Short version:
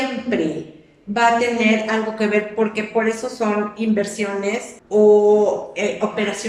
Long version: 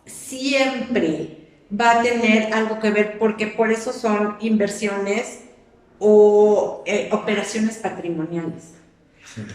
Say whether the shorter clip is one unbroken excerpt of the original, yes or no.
no